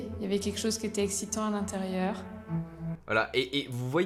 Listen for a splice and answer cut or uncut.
uncut